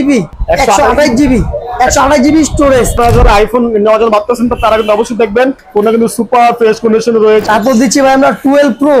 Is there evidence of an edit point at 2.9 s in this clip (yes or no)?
yes